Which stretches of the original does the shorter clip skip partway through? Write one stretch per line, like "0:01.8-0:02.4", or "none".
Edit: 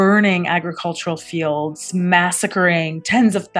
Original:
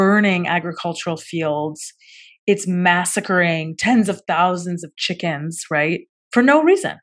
0:01.9-0:02.6